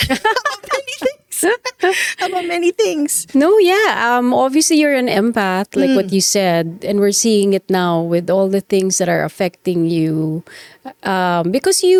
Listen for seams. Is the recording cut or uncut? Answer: uncut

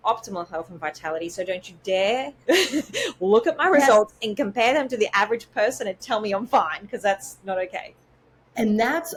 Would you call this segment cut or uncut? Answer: uncut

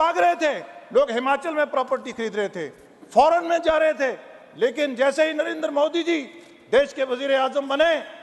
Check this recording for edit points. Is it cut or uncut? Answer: uncut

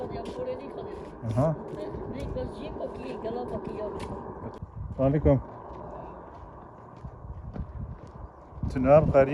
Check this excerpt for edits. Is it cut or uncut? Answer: cut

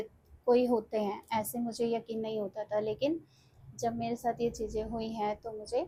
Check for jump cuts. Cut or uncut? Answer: uncut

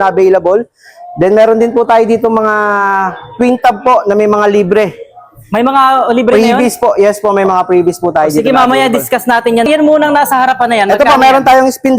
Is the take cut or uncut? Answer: uncut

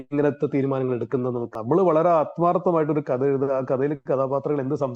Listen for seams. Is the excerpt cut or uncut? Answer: cut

